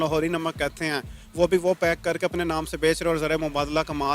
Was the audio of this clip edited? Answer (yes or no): no